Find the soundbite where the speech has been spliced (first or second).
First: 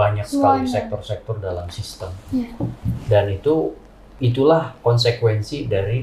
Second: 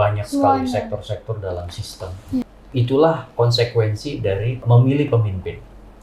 second